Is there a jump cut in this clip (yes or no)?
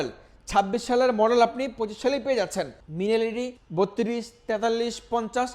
yes